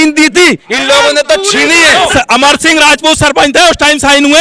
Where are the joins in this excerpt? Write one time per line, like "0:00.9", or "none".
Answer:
0:02.1